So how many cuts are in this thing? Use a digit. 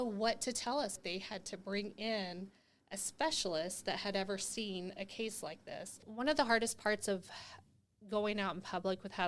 2